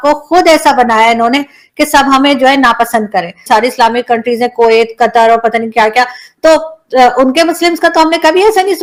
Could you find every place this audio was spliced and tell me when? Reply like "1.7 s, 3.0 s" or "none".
none